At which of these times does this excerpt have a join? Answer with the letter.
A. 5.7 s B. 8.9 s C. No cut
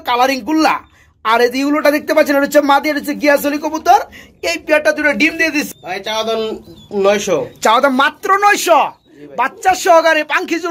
A